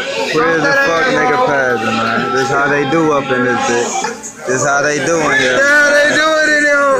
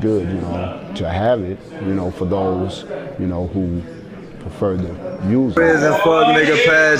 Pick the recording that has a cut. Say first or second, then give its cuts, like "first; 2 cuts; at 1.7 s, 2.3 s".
second; 1 cut; at 5.6 s